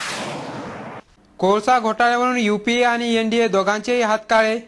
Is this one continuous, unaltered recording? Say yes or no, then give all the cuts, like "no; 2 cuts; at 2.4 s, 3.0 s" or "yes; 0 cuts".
no; 1 cut; at 1.0 s